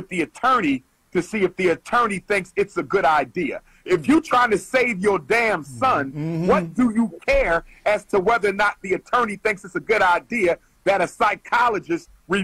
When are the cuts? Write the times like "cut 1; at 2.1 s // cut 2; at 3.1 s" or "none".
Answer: none

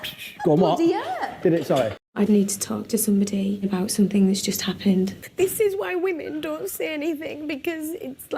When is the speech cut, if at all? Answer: cut 1; at 2.0 s // cut 2; at 5.2 s

